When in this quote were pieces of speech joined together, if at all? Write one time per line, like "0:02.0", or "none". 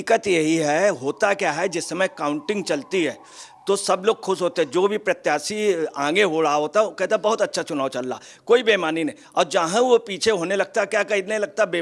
none